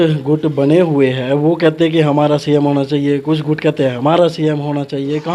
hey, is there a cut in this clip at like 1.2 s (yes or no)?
no